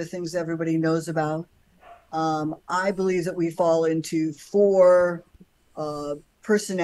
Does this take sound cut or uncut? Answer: uncut